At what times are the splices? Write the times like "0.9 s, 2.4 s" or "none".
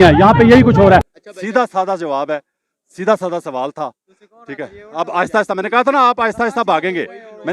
1.1 s